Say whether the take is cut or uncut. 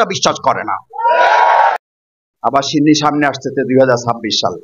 cut